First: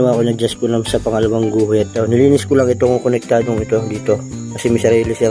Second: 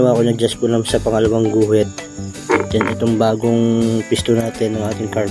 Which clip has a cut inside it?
first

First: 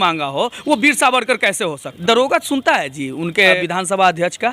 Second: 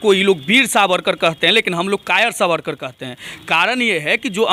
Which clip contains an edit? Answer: first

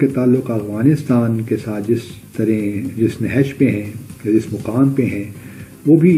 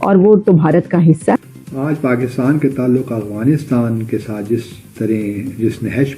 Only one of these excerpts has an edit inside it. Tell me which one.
second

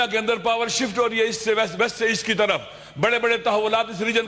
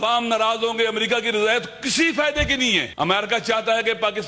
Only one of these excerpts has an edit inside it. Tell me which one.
second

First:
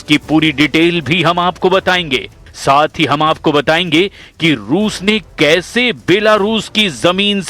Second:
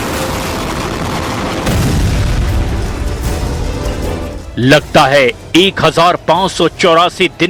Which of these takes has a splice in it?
first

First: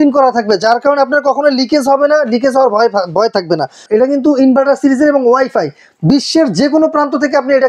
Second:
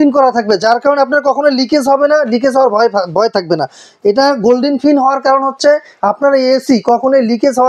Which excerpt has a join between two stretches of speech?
first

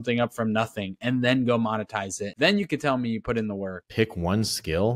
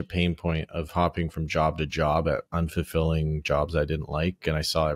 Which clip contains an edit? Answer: first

